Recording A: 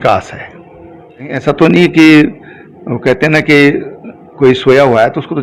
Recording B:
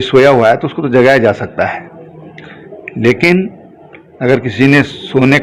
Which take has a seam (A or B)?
A